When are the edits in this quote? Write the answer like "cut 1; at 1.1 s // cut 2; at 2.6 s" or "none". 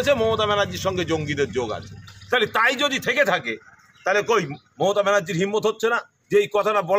none